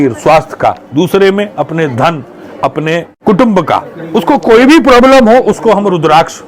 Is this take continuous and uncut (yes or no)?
yes